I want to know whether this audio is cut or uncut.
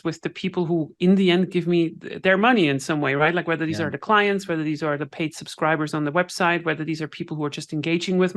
uncut